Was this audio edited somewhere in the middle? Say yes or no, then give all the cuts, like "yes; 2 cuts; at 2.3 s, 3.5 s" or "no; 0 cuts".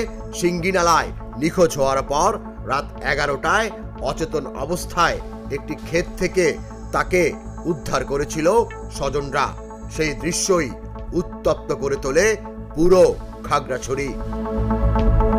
no; 0 cuts